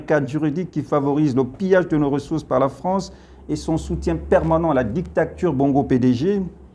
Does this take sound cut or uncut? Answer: uncut